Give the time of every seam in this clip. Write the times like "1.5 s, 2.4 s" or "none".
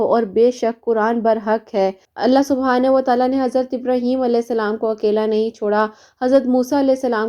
2.0 s